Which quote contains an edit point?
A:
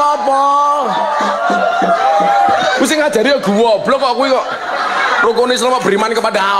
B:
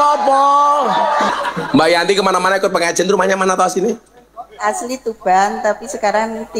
B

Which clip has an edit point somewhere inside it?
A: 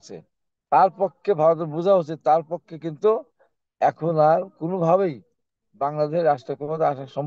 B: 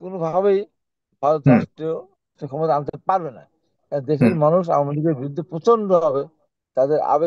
B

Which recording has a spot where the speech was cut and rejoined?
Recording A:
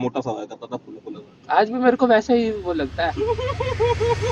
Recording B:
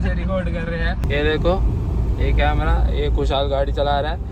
B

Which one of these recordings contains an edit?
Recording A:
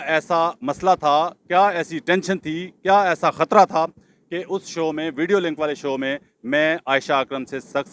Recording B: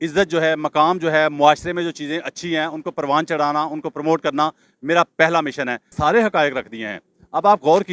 B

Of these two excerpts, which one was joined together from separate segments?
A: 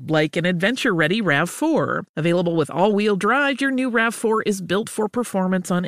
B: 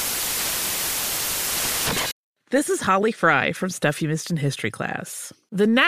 B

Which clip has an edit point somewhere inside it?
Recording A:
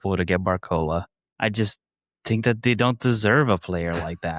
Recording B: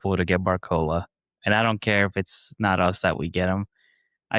A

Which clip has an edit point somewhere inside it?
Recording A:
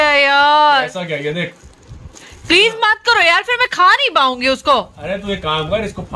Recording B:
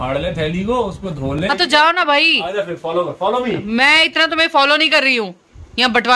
B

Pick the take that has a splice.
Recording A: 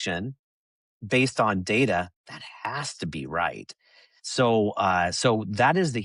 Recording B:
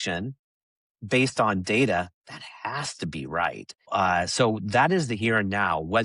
B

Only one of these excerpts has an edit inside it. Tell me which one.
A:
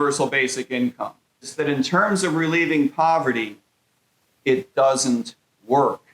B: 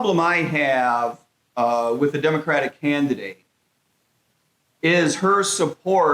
A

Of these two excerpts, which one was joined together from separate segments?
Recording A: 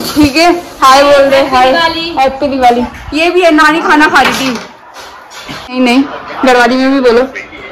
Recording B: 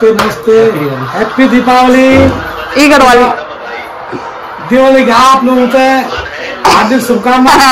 A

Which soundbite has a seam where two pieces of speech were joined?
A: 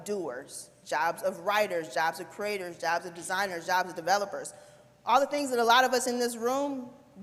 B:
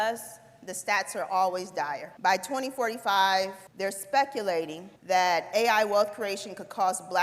B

